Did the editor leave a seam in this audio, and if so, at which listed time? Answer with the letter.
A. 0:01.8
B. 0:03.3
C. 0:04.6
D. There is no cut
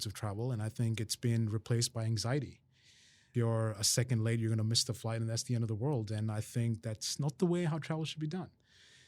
B